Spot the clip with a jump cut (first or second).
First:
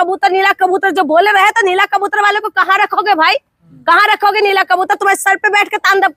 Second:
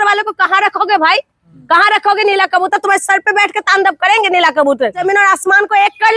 second